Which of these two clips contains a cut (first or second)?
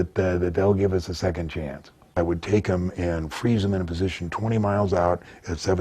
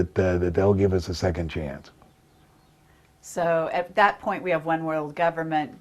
first